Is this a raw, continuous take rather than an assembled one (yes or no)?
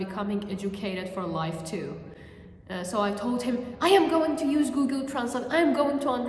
yes